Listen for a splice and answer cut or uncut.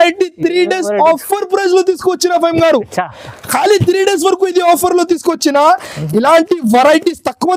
uncut